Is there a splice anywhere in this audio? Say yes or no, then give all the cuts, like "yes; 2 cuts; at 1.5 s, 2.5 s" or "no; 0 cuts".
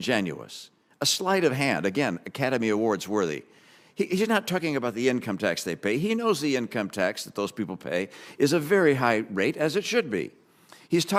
no; 0 cuts